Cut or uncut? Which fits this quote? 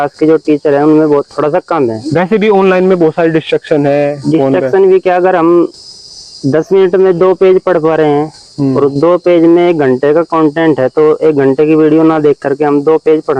uncut